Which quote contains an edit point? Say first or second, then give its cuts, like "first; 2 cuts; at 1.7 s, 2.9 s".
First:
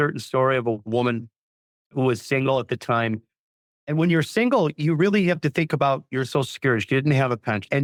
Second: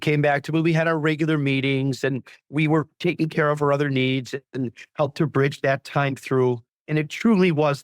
second; 1 cut; at 6.7 s